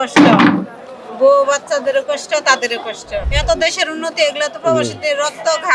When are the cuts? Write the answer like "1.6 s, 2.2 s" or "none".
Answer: 3.3 s